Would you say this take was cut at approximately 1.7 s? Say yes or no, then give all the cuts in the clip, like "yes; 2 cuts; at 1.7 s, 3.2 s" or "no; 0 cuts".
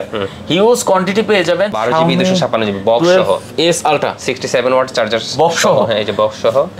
yes; 1 cut; at 1.7 s